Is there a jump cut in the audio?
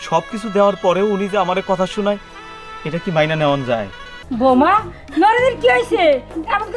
yes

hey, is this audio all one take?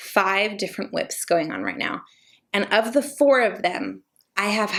yes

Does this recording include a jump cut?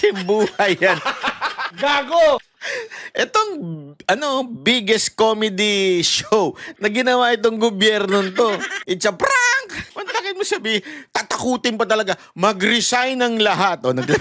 yes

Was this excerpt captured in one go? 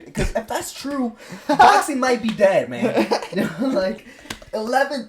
yes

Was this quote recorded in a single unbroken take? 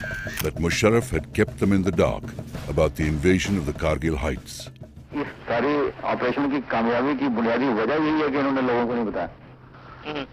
yes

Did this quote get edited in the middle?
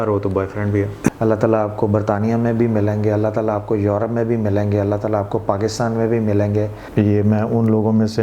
yes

